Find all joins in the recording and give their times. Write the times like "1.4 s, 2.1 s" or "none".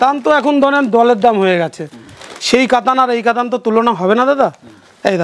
none